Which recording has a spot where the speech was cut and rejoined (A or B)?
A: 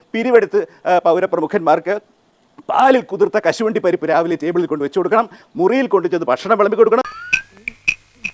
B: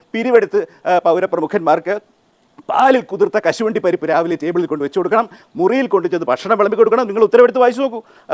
B